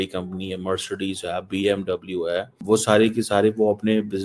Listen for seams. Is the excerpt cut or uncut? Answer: cut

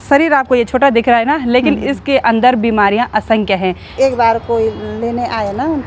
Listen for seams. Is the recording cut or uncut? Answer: cut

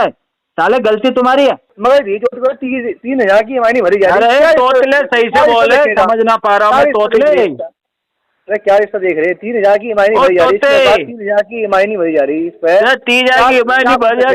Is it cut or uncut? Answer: cut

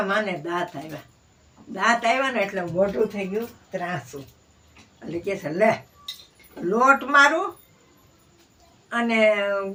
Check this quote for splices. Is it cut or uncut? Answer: uncut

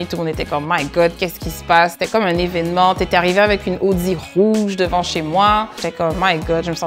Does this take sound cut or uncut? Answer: cut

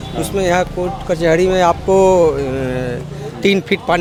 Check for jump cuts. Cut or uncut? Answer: uncut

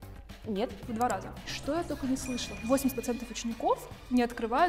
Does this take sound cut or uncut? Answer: cut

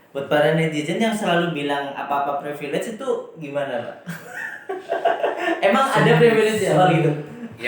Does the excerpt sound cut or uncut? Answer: uncut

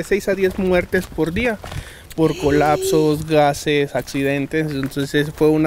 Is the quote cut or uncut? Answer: uncut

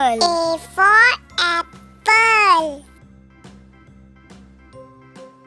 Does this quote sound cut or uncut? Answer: uncut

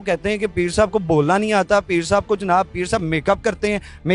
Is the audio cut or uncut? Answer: uncut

